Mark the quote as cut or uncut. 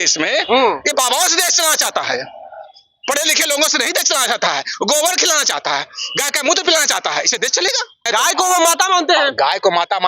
cut